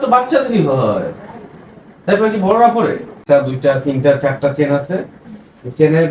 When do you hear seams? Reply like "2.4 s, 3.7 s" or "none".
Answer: 3.2 s